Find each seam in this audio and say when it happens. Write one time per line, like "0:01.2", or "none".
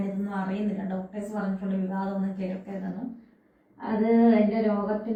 none

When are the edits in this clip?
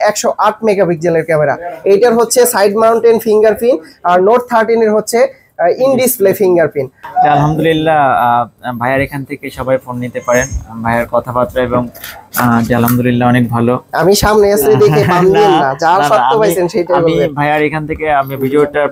0:07.0

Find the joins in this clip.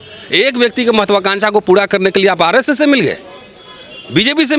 none

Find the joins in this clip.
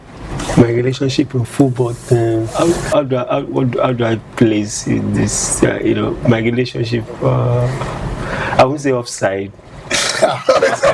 0:02.5

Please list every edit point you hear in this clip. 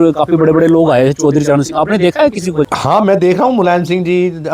none

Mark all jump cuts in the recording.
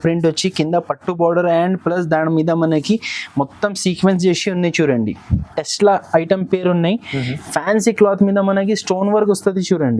0:05.4

